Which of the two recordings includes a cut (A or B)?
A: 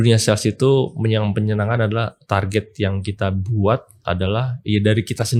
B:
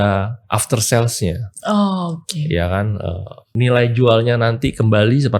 B